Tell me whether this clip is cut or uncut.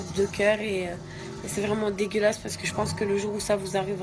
uncut